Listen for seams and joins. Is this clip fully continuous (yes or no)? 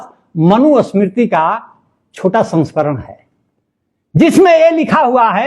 yes